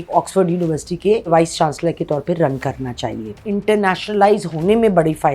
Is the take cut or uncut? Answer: cut